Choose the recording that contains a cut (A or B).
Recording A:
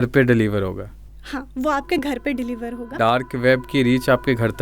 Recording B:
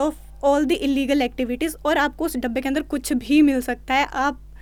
A